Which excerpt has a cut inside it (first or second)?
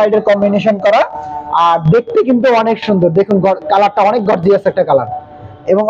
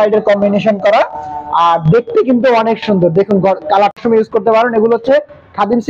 second